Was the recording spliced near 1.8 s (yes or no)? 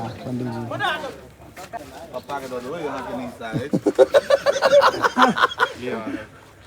yes